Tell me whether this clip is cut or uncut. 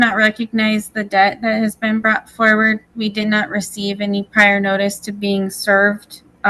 uncut